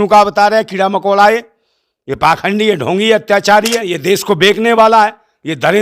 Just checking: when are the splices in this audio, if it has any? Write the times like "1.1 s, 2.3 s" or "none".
3.9 s